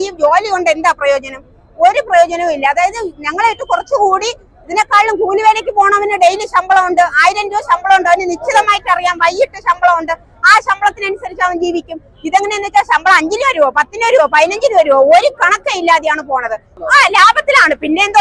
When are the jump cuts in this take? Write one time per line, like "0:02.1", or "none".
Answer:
0:16.7